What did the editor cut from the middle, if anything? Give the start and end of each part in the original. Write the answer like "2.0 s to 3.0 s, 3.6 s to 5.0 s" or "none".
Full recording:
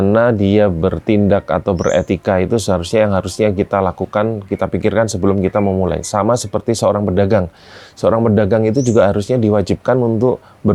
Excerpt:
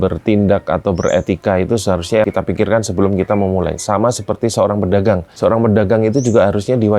3.1 s to 4.5 s, 7.5 s to 7.9 s